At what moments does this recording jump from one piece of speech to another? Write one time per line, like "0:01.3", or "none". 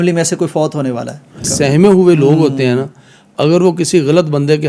0:01.5

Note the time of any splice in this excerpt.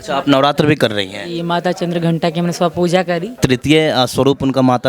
0:03.4

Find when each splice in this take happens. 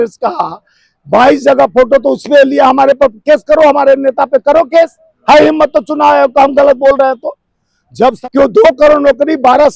0:08.2

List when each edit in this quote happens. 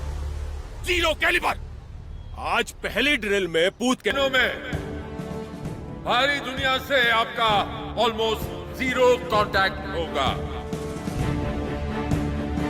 0:03.6

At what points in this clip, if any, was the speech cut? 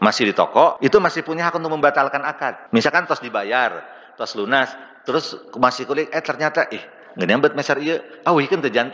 0:00.8
0:02.6

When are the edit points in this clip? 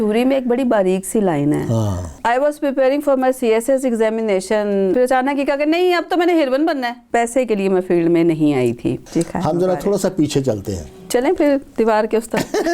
0:02.1
0:04.9
0:07.0
0:09.0
0:11.0

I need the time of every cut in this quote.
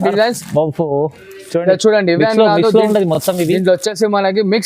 none

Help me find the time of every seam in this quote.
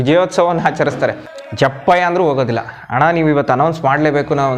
0:01.3

